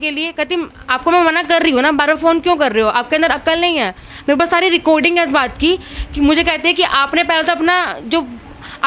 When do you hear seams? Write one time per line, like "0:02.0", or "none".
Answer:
none